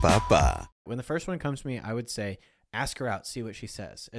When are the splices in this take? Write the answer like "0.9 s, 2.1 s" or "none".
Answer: 0.9 s